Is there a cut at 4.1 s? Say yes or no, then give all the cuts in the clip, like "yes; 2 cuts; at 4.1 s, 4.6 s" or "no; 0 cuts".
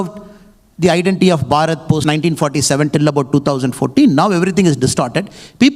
no; 1 cut; at 2.0 s